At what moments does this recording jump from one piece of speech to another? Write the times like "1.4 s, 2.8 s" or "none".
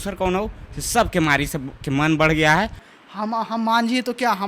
2.8 s